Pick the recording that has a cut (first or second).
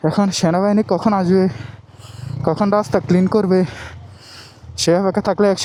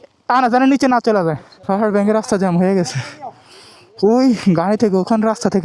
second